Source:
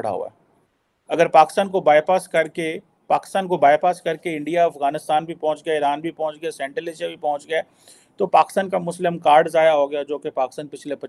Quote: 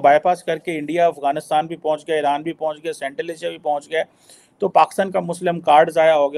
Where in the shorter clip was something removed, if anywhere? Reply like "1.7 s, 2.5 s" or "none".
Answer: none